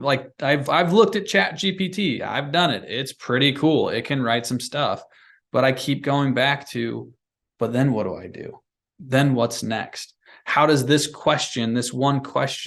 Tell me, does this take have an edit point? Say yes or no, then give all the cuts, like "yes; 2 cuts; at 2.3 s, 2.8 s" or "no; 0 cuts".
no; 0 cuts